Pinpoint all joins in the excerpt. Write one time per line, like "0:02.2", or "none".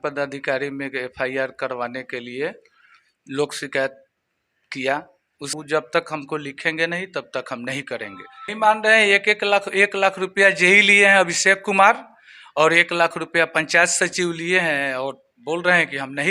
0:05.5
0:08.5